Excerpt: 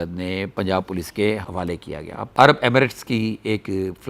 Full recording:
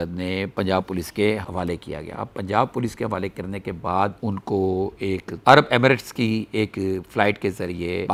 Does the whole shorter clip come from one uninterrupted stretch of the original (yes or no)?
no